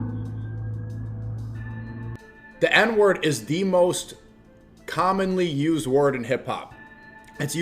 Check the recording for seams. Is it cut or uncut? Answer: cut